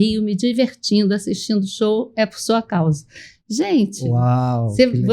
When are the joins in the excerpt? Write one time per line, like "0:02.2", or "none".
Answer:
none